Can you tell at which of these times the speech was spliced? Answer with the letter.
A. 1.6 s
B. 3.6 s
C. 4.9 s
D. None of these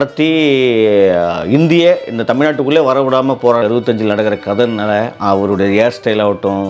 B